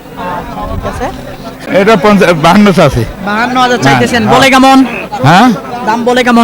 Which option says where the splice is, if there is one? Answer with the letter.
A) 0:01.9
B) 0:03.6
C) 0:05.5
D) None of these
A